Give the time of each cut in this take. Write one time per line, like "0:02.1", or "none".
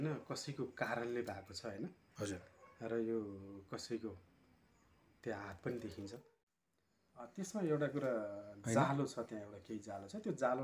0:06.5